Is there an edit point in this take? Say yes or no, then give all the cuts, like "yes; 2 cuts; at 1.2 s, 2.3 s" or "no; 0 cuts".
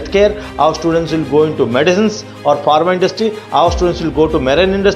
no; 0 cuts